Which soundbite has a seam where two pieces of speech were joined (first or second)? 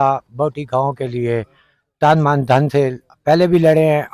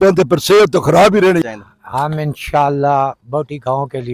second